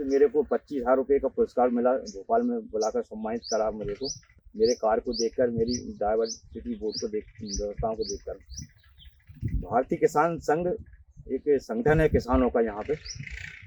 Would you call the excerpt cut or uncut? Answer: uncut